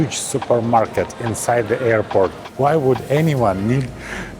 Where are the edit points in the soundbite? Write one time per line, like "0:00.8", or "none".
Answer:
0:02.4